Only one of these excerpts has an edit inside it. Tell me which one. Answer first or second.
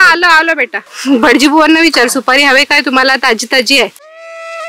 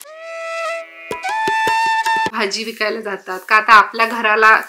second